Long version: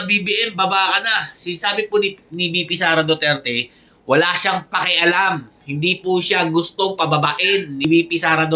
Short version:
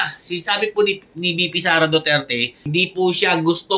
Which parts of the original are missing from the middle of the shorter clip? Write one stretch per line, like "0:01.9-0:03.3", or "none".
0:03.7-0:05.6